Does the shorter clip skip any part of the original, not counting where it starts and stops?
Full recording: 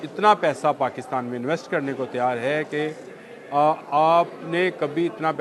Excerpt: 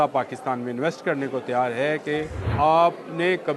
yes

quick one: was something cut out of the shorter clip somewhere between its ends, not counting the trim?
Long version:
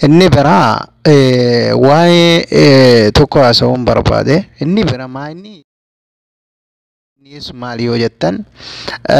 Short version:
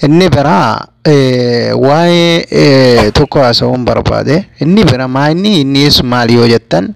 yes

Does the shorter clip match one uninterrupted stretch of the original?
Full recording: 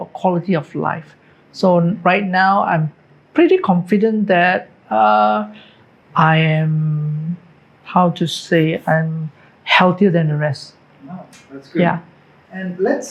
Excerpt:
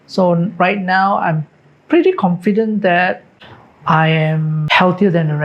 no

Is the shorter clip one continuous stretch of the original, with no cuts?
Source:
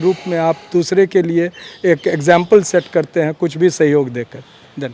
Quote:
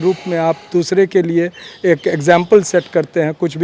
yes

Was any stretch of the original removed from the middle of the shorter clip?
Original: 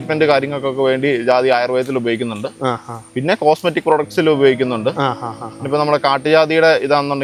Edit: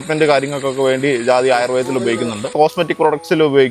yes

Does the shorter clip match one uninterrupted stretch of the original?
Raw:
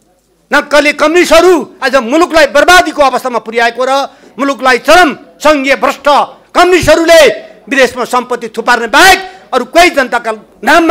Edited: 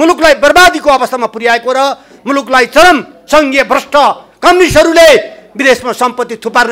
yes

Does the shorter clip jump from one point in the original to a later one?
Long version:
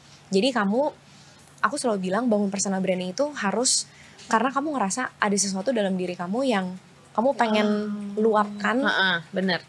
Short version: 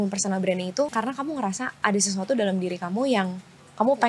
yes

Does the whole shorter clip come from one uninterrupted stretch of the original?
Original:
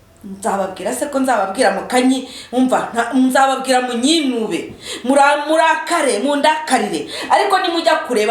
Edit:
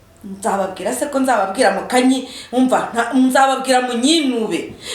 yes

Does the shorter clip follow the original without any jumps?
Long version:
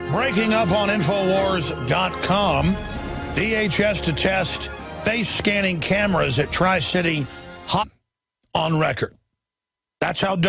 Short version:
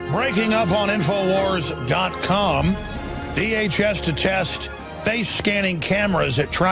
yes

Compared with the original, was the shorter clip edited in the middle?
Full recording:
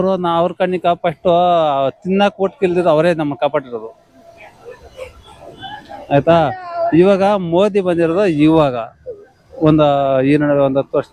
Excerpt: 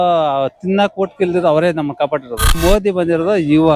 yes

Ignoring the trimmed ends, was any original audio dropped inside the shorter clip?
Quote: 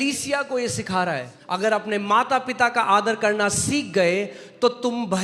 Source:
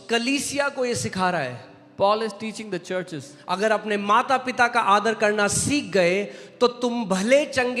yes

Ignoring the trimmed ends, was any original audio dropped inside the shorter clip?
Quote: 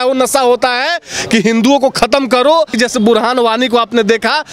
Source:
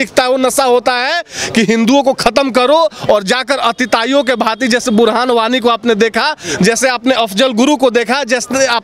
yes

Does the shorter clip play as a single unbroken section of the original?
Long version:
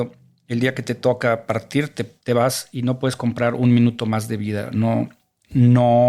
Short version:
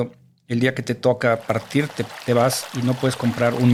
yes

